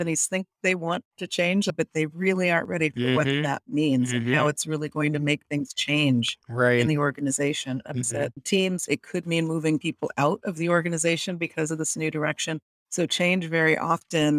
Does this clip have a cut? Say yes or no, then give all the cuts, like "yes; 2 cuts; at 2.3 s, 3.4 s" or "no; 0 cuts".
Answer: yes; 3 cuts; at 1.7 s, 8.9 s, 12.7 s